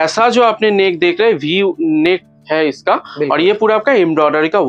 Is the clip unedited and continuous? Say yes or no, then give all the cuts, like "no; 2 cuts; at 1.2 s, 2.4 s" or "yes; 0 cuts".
yes; 0 cuts